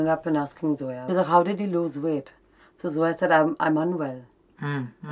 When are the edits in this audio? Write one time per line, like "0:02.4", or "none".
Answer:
0:00.9